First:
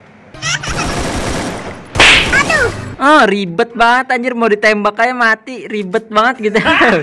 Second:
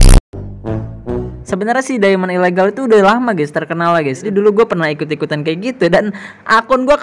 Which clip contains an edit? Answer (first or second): second